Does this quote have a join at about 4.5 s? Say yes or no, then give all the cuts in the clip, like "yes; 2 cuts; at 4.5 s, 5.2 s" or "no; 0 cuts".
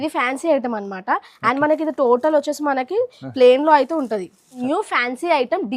yes; 1 cut; at 4.5 s